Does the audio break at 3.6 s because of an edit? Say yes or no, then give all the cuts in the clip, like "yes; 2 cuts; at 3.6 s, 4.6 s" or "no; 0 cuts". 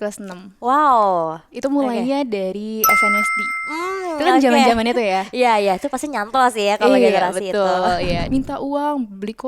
no; 1 cut; at 8.2 s